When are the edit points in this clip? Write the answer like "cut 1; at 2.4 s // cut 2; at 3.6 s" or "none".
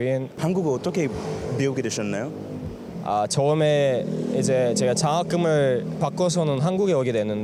none

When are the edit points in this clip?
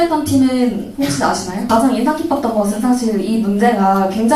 cut 1; at 1.7 s

